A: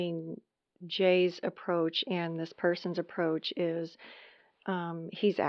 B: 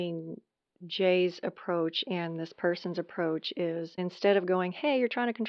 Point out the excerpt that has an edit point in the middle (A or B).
B